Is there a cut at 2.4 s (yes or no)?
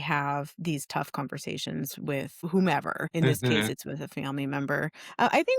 yes